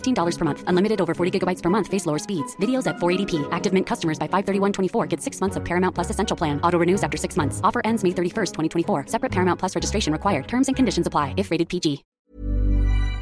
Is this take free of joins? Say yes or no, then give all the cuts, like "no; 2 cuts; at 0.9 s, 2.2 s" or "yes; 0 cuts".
no; 1 cut; at 12.1 s